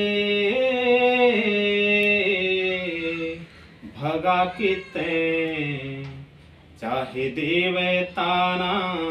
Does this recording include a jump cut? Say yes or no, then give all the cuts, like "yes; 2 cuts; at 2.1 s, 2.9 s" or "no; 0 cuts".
no; 0 cuts